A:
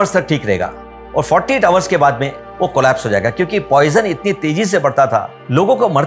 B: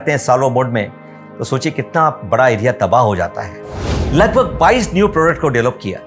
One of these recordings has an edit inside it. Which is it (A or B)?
B